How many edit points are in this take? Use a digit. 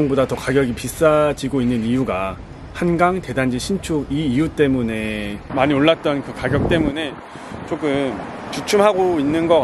1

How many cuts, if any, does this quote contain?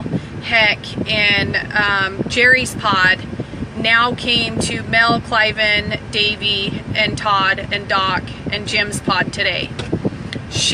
1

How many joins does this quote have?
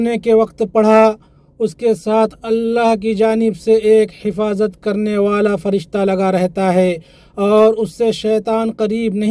0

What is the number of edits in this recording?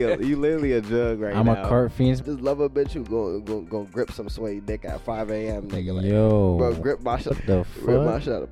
2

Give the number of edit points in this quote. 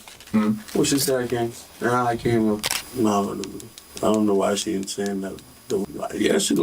2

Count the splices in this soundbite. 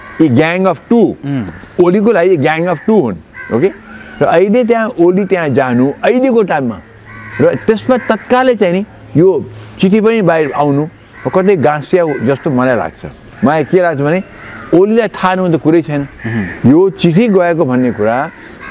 0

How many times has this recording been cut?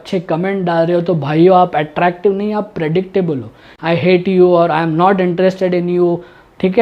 1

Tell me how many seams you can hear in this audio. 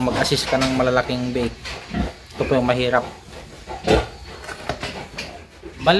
1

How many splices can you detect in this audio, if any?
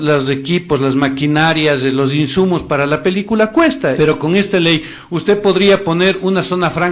1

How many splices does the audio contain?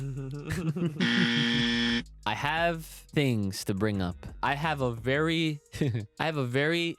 4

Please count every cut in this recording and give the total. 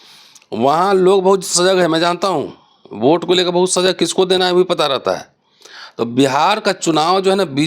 0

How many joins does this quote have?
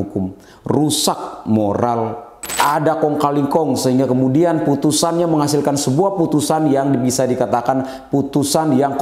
1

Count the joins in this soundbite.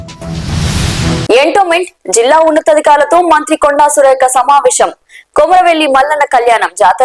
1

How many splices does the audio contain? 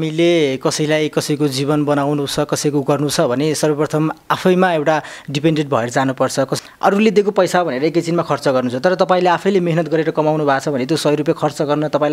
1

